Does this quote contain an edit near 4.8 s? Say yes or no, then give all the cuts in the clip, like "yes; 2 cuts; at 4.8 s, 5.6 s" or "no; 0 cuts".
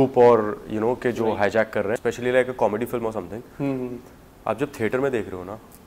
no; 1 cut; at 2.0 s